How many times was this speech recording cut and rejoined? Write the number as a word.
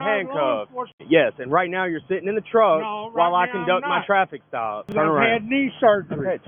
two